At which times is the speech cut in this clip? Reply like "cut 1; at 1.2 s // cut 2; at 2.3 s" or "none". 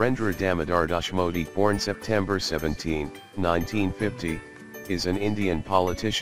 cut 1; at 1.5 s